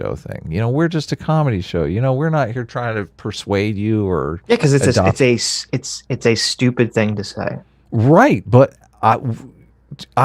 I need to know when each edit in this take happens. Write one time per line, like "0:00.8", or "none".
none